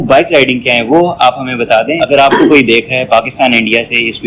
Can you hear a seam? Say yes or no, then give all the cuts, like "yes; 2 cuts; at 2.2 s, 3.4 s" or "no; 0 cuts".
yes; 1 cut; at 2.0 s